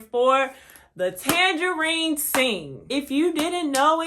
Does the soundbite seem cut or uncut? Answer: cut